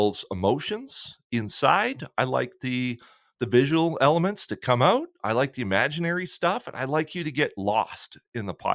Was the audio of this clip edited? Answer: no; 0 cuts

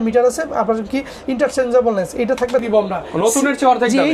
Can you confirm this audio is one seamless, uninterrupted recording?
no; 1 cut; at 2.6 s

